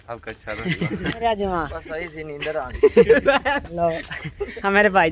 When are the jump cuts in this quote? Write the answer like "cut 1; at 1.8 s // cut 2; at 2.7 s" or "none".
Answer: cut 1; at 1.2 s